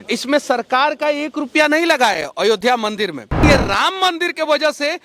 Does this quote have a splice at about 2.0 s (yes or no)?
no